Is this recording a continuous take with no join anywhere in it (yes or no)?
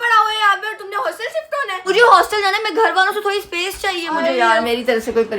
no